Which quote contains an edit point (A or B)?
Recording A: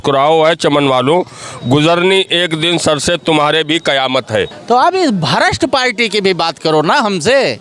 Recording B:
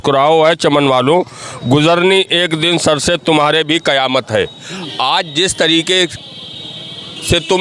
A